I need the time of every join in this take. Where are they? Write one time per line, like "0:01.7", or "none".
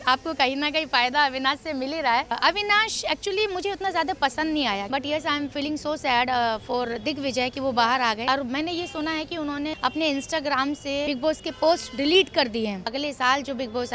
0:02.4
0:04.8
0:08.2
0:09.8
0:11.1
0:12.9

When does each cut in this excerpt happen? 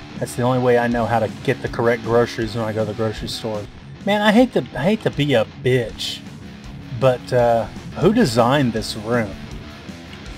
0:03.8
0:07.8

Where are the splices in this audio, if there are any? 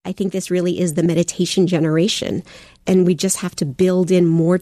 0:01.1
0:02.8

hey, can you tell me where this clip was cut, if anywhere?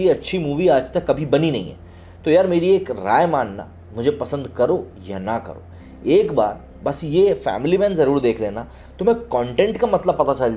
none

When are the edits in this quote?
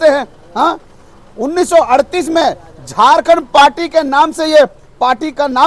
none

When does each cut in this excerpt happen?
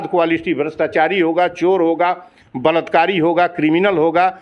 none

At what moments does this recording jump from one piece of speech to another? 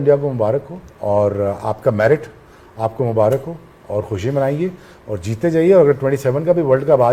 none

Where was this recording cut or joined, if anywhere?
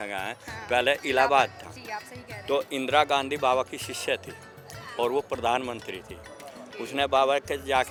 none

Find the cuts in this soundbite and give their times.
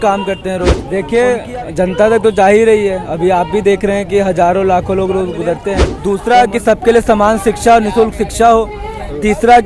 0:00.8
0:05.9

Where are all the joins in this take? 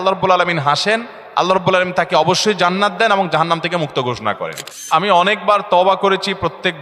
0:04.7

